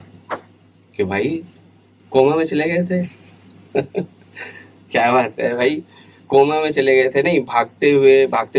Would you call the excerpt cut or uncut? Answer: uncut